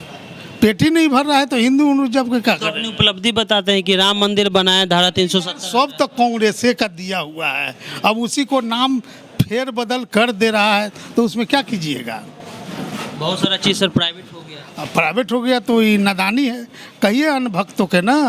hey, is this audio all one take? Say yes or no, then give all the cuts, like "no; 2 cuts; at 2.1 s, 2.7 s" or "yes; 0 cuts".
yes; 0 cuts